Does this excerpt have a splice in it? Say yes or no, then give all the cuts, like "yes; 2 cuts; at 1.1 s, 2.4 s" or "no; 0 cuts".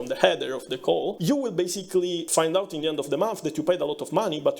yes; 2 cuts; at 1.2 s, 2.2 s